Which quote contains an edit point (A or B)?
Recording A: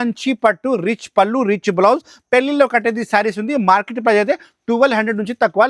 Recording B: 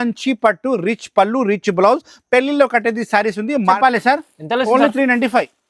B